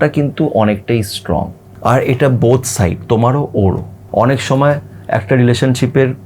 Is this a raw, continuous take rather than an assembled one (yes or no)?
no